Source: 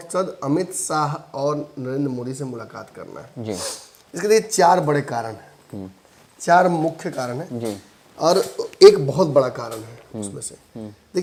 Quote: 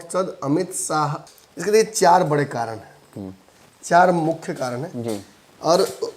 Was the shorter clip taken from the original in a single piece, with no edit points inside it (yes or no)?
no